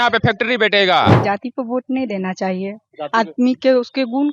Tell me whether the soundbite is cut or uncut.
cut